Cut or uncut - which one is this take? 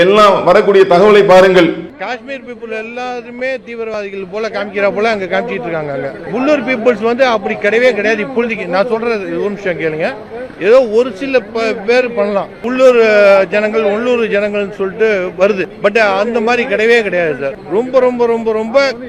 cut